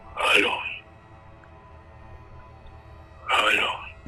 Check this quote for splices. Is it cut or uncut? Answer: uncut